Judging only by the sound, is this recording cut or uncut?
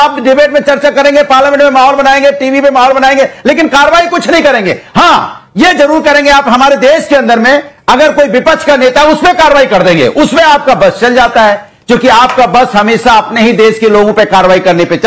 uncut